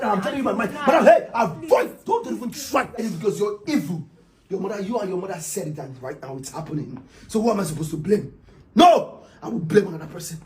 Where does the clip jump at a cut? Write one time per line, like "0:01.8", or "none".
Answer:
0:03.0